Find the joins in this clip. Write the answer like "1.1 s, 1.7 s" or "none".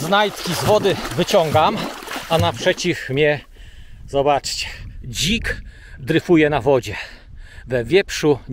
none